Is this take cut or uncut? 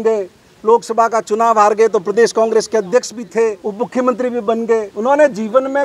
cut